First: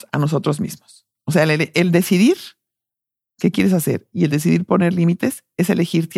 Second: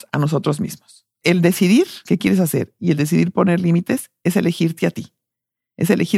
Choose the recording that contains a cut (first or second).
second